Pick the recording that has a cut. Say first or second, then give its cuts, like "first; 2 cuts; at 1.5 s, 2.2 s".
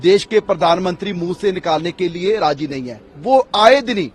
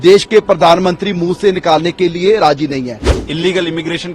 second; 1 cut; at 3.1 s